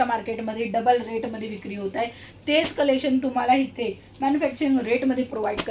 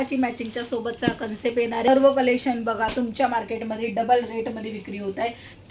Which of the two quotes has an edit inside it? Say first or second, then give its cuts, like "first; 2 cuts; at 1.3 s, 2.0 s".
second; 1 cut; at 1.9 s